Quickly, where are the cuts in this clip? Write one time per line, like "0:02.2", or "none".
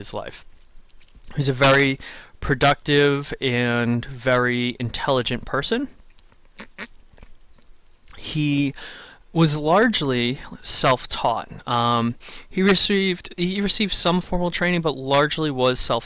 0:12.8

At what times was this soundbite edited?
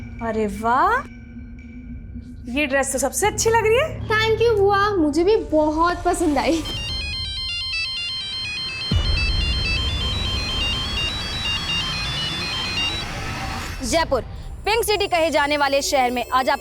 0:13.7

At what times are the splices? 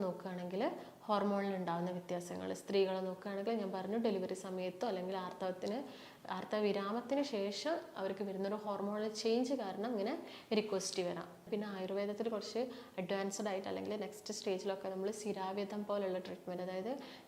0:11.4

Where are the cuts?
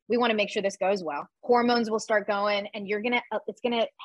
0:01.3

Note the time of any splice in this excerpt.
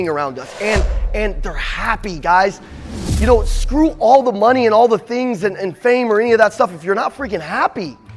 none

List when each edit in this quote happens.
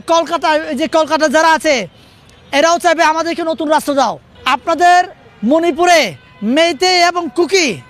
0:04.3

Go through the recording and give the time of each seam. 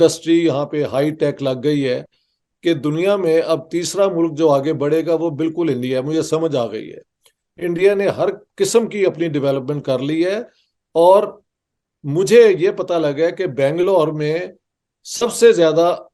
none

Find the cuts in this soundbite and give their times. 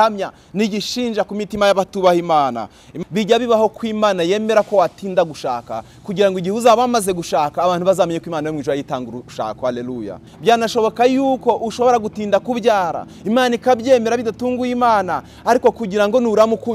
0:02.8
0:10.3

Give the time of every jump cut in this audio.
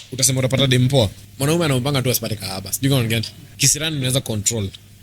0:01.2
0:03.4

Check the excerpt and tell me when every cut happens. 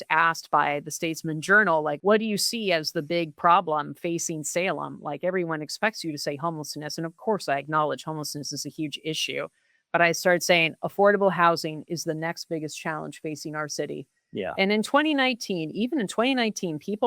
0:02.0

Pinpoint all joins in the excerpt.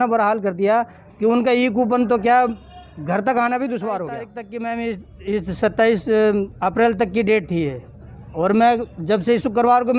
0:04.3

